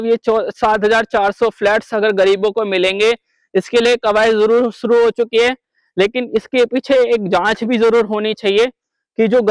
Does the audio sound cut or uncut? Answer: uncut